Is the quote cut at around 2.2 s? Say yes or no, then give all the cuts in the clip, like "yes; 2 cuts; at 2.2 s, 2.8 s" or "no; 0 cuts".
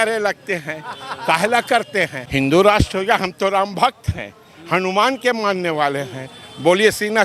yes; 1 cut; at 2.2 s